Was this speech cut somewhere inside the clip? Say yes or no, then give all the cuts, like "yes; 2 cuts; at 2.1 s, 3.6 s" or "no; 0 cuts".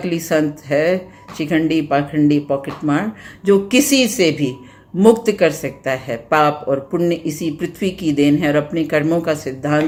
no; 0 cuts